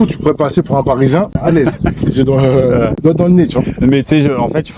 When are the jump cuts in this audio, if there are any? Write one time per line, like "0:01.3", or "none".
0:01.3
0:02.9